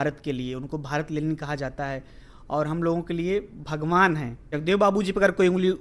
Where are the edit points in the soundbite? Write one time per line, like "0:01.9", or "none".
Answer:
0:04.5